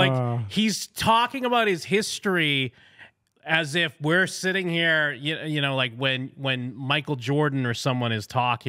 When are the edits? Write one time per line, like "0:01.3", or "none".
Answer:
none